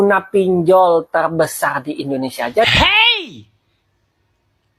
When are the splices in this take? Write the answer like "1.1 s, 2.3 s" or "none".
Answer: 2.7 s